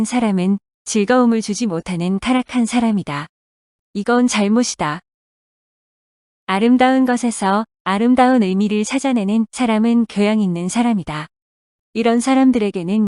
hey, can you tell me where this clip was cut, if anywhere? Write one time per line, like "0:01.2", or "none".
none